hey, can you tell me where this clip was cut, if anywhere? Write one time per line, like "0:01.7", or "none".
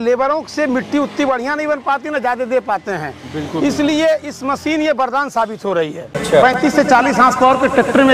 0:06.1